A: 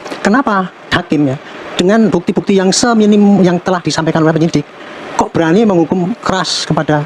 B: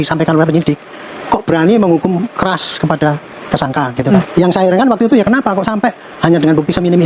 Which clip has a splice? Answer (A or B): B